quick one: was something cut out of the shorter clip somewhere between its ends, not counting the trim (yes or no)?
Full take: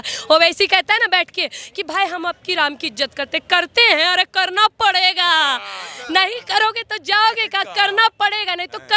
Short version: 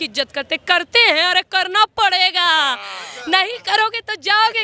no